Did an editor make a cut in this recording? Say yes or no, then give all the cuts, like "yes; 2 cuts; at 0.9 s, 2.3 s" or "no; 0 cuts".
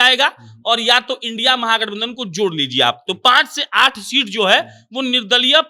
no; 0 cuts